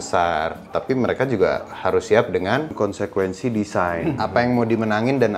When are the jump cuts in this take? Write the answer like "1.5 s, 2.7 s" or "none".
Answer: 2.7 s, 4.2 s